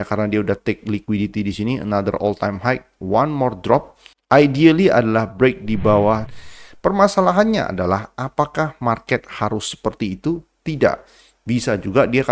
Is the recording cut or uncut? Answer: cut